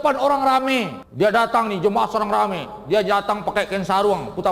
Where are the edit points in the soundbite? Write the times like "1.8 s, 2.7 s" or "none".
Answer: 1.0 s